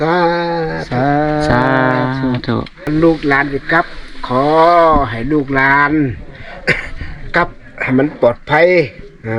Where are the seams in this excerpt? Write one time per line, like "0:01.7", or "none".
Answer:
0:02.7